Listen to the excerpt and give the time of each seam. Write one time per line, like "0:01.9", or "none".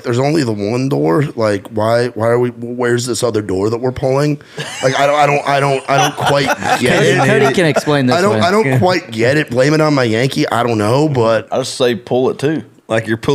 0:11.5